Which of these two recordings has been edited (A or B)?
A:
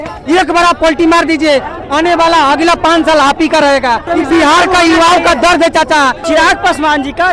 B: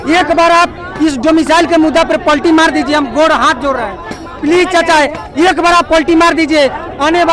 A